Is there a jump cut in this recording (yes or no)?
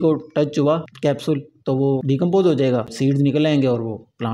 yes